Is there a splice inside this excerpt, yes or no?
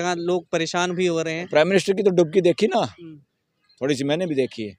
yes